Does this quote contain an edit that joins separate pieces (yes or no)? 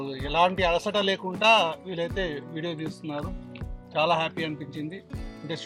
no